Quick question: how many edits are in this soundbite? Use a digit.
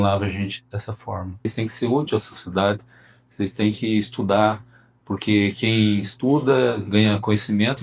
1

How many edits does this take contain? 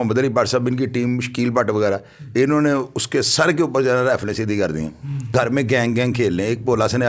1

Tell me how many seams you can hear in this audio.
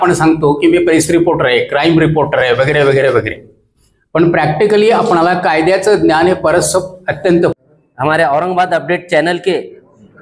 1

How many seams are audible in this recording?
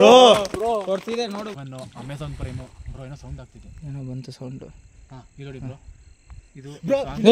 1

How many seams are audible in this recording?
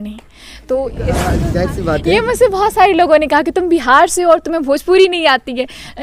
1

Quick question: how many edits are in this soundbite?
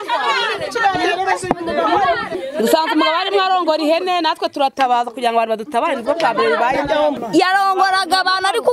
2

